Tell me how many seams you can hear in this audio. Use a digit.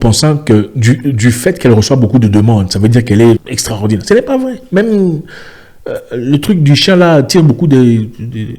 1